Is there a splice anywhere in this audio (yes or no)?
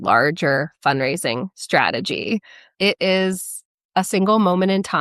yes